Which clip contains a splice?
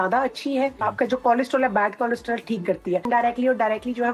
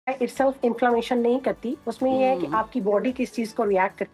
first; 2 cuts; at 0.8 s, 3.1 s

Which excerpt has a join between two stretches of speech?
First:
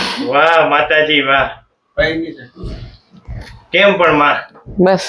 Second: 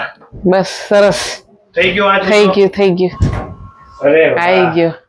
second; 1 cut; at 3.2 s

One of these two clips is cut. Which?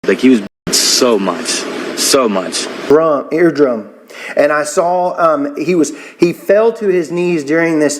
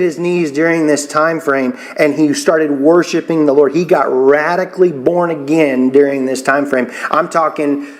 first; 1 cut; at 2.8 s

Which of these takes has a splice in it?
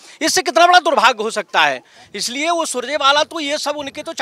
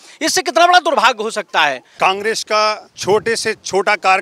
second; 2 cuts; at 1.9 s, 2.9 s

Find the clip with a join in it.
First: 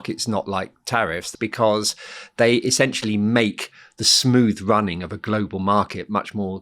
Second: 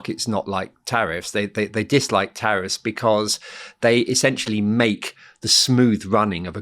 first; 1 cut; at 1.3 s

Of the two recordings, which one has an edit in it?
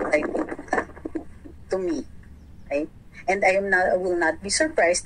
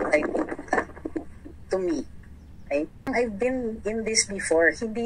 second; 1 cut; at 3.1 s

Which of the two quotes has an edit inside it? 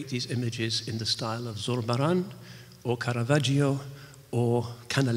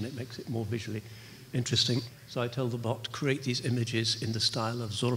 second; 1 cut; at 2.1 s

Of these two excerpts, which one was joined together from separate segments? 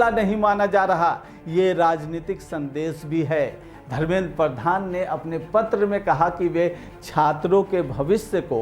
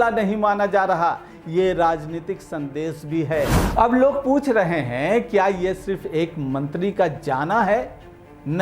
second; 1 cut; at 3.6 s

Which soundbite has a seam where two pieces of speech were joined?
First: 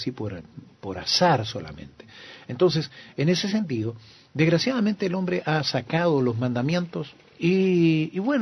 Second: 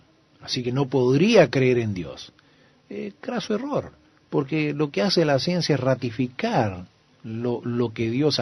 second; 1 cut; at 4.5 s

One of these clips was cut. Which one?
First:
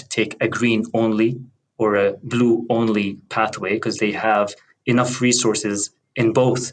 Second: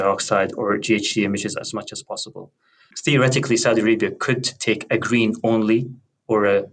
second; 1 cut; at 2.9 s

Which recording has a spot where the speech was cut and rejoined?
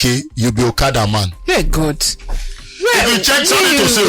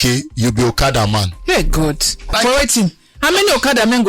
second; 1 cut; at 2.3 s

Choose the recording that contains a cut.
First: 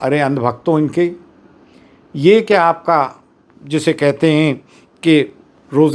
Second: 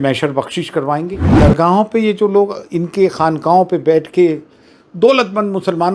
second; 1 cut; at 1.2 s

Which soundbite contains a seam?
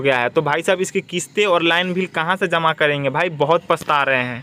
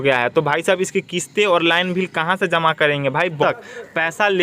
second; 1 cut; at 3.4 s

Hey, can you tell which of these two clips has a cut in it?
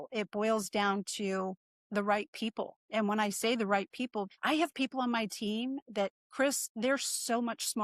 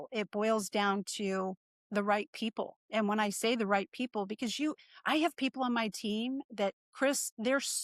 first; 1 cut; at 4.3 s

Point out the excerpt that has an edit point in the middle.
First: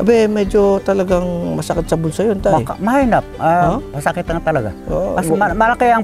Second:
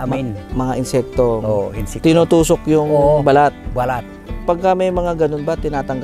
second; 1 cut; at 4.4 s

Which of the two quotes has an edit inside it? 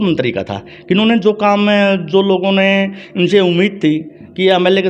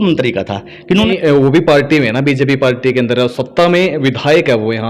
second; 1 cut; at 1.1 s

